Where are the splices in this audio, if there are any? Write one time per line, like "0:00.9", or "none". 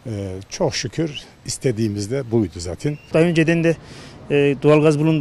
0:03.1